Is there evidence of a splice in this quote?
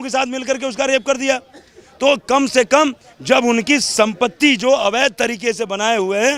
no; 0 cuts

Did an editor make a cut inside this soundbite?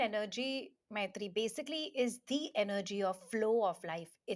no; 0 cuts

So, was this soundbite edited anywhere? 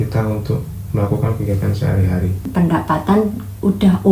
yes; 1 cut; at 2.5 s

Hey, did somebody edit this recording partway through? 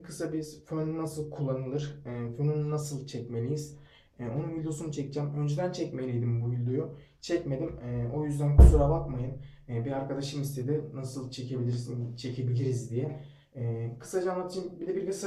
no; 0 cuts

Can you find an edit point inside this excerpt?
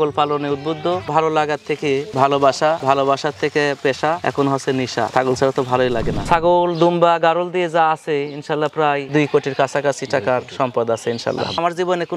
yes; 2 cuts; at 1.0 s, 6.2 s

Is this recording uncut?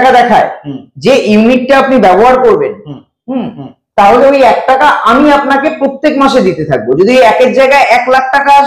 yes; 0 cuts

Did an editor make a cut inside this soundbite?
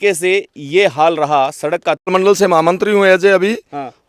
yes; 1 cut; at 2.1 s

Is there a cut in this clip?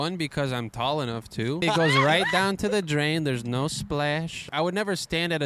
yes; 2 cuts; at 1.6 s, 4.5 s

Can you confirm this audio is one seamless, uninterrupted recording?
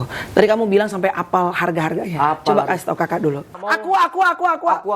no; 1 cut; at 3.5 s

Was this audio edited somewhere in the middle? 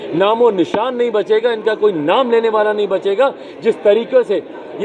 no; 0 cuts

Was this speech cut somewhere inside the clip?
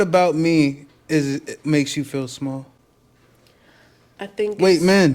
no; 0 cuts

